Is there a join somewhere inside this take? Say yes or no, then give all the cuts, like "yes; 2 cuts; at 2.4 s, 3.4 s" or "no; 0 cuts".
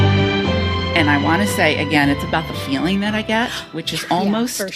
yes; 1 cut; at 0.9 s